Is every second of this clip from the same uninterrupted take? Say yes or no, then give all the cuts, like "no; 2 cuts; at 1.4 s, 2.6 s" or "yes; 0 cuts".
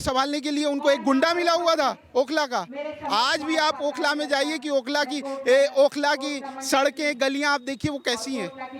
yes; 0 cuts